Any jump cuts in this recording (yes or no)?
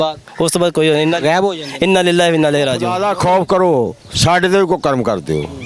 yes